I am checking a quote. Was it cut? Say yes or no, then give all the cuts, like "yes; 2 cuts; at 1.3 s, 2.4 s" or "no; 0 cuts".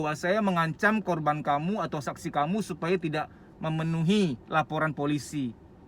yes; 1 cut; at 4.4 s